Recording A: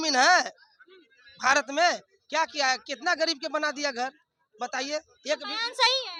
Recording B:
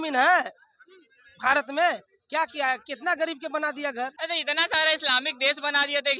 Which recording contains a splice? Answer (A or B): B